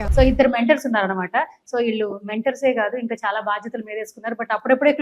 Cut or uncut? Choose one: uncut